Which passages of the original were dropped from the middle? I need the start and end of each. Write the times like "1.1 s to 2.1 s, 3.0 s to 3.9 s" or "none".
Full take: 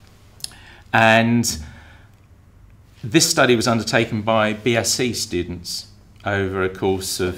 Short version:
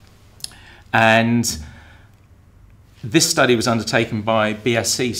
none